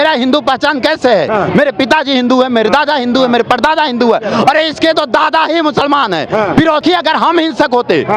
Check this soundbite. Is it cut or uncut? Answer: cut